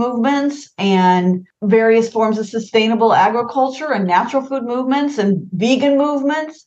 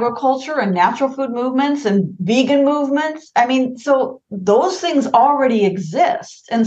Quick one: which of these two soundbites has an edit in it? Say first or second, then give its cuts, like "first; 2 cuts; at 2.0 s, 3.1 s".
first; 1 cut; at 1.5 s